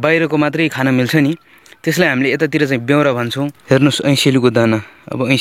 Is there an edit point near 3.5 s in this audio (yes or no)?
yes